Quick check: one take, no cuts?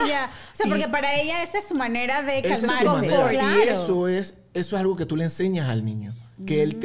yes; 0 cuts

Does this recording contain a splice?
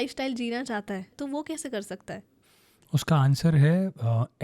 yes; 2 cuts; at 1.1 s, 2.4 s

